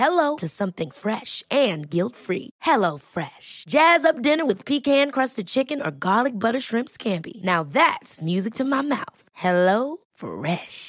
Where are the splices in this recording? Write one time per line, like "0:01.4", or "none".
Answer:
none